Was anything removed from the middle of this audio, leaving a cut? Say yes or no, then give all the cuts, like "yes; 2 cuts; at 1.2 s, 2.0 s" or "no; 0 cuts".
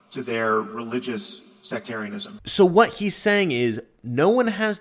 yes; 1 cut; at 2.3 s